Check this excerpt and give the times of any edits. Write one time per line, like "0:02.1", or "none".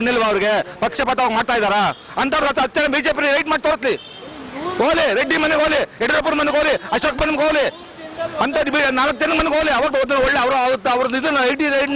none